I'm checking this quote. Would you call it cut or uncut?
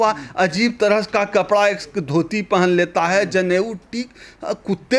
uncut